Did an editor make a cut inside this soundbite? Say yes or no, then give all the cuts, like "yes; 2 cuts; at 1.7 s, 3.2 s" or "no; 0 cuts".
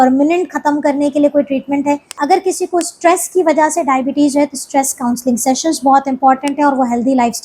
yes; 1 cut; at 2.1 s